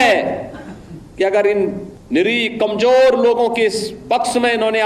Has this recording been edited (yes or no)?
yes